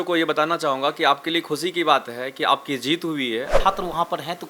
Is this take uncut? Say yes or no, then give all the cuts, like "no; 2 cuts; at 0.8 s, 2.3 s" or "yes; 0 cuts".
no; 1 cut; at 3.5 s